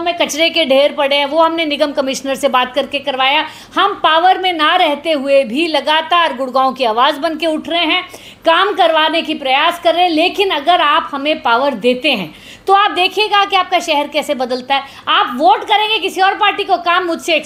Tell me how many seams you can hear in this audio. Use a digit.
0